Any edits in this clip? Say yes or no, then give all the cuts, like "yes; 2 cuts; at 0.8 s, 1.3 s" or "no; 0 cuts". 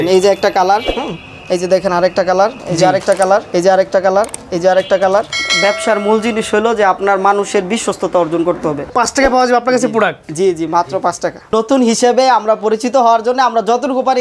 yes; 5 cuts; at 2.6 s, 3.5 s, 5.4 s, 8.9 s, 11.5 s